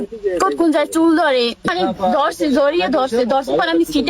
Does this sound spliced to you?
yes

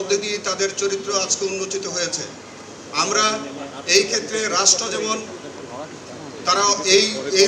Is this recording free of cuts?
yes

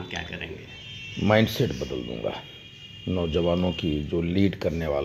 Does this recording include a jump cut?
no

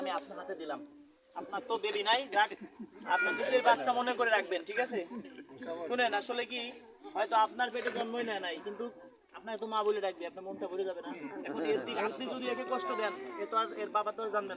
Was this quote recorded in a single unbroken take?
yes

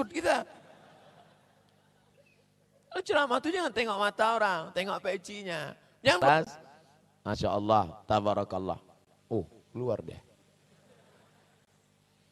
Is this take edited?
yes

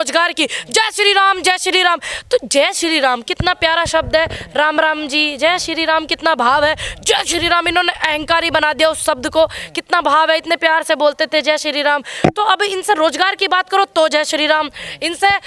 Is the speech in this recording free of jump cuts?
yes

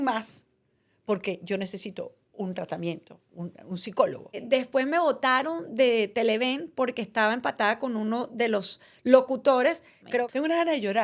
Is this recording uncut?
no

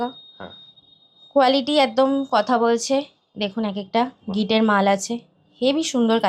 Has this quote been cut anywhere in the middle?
no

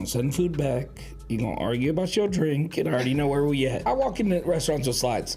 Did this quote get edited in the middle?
yes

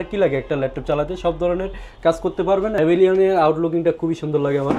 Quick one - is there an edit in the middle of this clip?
yes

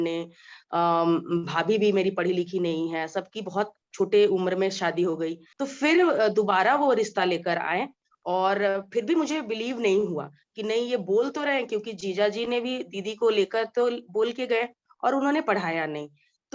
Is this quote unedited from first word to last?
no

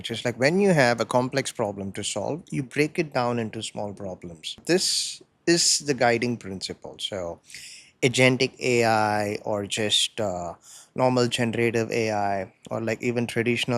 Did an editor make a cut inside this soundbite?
yes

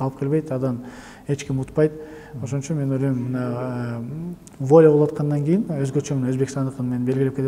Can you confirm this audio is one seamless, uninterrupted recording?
yes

